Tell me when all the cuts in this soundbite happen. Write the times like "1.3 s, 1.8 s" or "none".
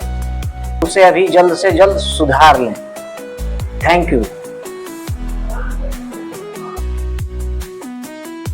4.3 s